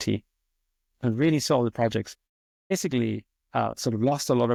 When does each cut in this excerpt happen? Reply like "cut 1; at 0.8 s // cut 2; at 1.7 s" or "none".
none